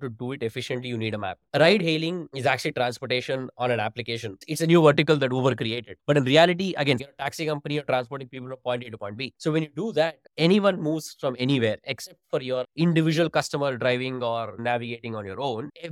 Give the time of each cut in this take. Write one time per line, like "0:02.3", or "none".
0:01.5
0:02.3
0:07.0
0:14.6